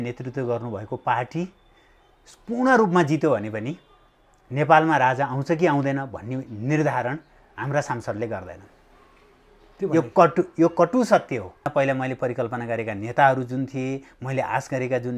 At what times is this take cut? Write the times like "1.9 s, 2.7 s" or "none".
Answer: 11.7 s